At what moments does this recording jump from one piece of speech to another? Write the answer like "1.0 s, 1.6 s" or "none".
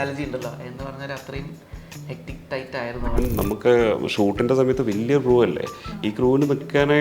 3.2 s

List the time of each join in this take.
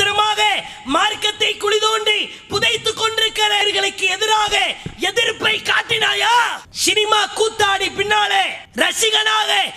3.6 s, 6.7 s, 8.6 s

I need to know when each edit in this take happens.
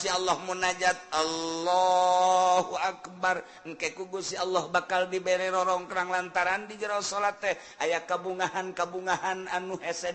none

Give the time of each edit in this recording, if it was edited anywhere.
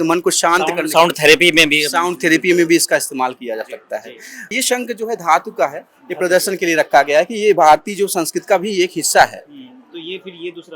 none

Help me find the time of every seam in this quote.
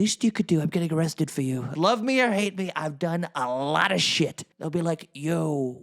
1.7 s, 4.5 s

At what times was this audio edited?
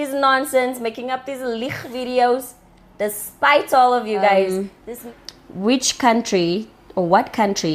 5.0 s

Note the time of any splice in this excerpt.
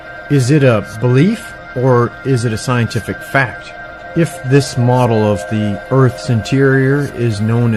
2.7 s

